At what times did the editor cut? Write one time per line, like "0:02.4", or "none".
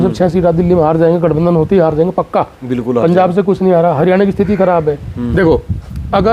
0:05.3